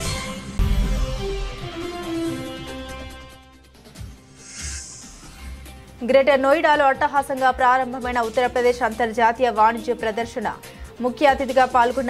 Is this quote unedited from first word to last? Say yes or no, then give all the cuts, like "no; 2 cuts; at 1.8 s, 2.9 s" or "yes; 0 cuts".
no; 1 cut; at 6.0 s